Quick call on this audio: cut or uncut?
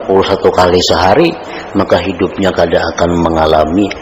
uncut